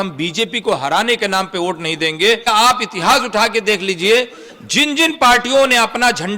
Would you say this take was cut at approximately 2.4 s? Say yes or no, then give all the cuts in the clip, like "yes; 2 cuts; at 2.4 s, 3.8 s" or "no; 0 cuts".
yes; 1 cut; at 2.4 s